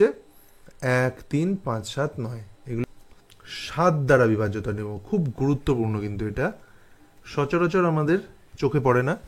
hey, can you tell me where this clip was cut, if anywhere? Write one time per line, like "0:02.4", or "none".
0:02.8